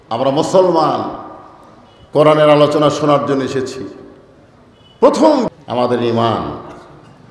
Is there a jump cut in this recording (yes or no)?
yes